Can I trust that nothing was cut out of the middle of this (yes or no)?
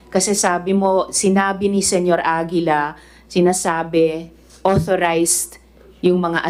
yes